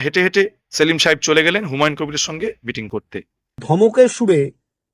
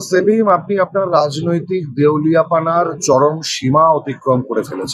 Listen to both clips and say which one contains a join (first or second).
first